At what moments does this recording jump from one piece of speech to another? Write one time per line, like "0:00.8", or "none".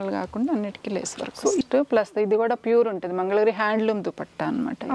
0:01.6